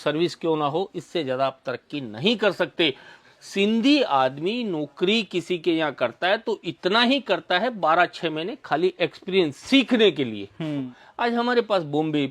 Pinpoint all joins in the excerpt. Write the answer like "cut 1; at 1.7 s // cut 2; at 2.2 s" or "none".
cut 1; at 3.2 s // cut 2; at 11.0 s